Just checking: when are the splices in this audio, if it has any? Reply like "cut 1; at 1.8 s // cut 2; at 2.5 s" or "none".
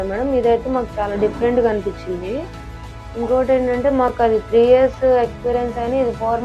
none